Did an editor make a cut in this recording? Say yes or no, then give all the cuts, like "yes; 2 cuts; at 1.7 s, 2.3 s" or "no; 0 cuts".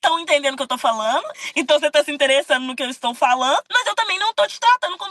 yes; 2 cuts; at 1.3 s, 3.7 s